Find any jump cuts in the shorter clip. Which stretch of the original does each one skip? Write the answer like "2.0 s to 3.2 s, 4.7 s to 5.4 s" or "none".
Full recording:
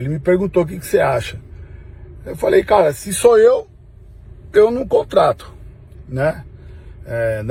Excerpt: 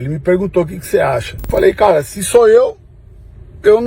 1.4 s to 2.3 s